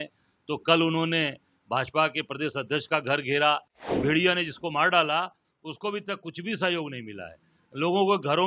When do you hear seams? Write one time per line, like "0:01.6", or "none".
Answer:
0:03.9